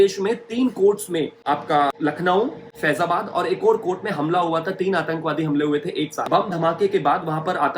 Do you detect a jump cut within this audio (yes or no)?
yes